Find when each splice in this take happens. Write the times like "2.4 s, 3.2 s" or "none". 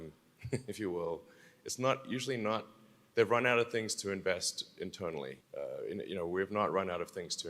5.4 s